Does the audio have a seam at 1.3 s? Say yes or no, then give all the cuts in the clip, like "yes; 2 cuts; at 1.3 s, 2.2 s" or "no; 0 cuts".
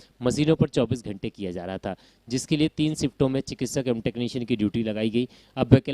no; 0 cuts